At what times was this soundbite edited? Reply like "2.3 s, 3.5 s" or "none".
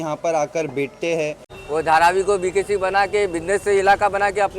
1.5 s